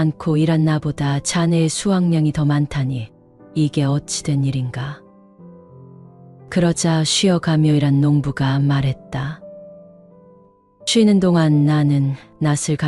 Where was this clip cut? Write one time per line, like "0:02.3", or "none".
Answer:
0:05.0
0:06.4